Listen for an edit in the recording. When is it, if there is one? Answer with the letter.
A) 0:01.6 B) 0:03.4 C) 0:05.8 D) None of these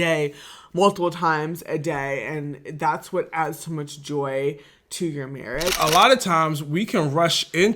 C